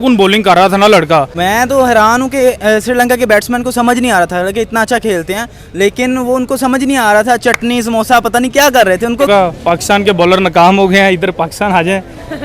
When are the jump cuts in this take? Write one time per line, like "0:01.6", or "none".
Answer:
0:01.3
0:09.3